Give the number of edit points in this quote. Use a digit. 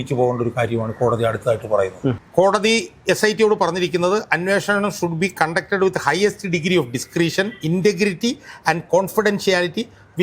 1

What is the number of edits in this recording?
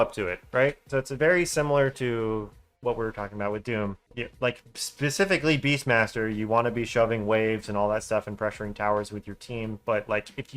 1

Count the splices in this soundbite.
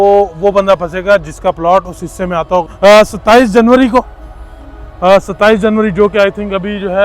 1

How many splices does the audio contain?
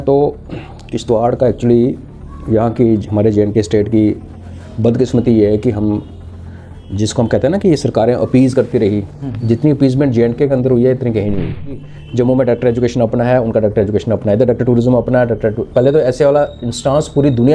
1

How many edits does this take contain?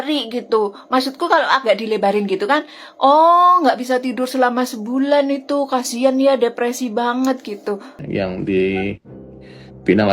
1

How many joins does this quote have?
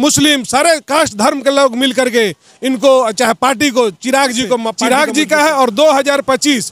1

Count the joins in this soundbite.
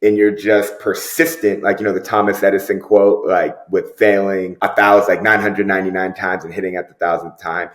1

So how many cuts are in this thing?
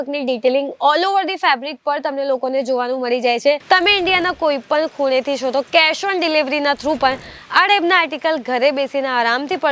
1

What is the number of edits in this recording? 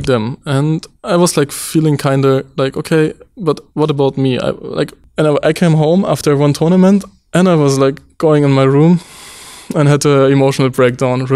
1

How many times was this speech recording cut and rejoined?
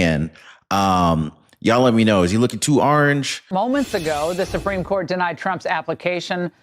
1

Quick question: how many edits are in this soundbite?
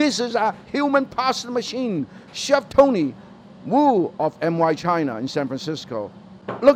0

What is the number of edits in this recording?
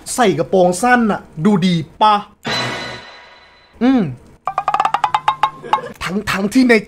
1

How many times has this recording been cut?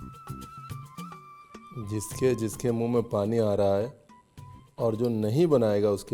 1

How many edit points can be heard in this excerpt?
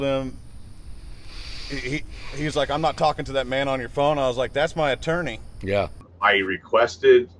1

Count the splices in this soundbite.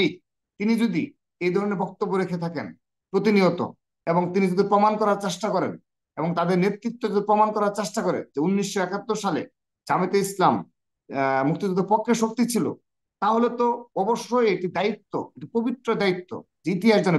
0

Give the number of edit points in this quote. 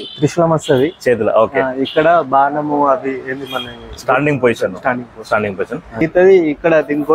1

